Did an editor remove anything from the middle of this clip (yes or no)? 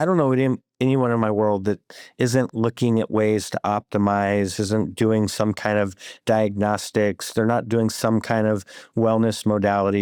no